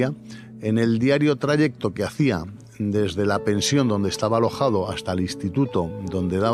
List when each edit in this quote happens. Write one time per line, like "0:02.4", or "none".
none